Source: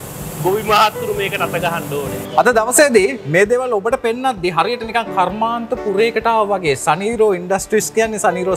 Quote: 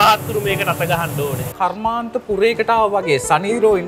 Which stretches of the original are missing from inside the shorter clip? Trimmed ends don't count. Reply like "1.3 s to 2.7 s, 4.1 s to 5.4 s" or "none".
2.3 s to 5.1 s